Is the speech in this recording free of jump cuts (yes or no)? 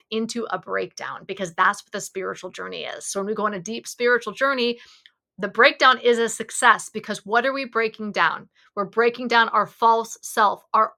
yes